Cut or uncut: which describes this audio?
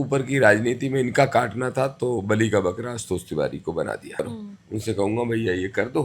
cut